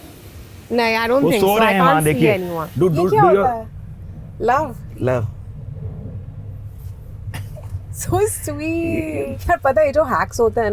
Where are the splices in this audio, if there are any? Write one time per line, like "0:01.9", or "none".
0:02.6
0:09.3